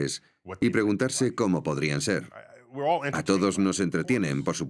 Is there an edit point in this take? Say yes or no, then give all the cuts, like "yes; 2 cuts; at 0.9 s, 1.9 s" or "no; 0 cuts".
no; 0 cuts